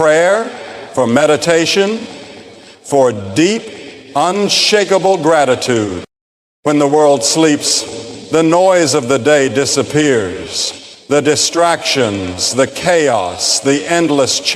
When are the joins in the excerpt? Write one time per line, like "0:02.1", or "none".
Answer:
none